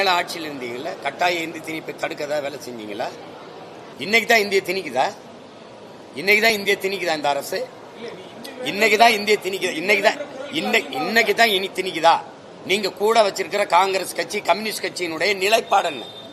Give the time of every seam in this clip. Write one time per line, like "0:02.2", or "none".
0:03.9